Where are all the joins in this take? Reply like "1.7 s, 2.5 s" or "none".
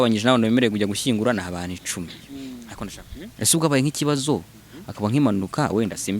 2.7 s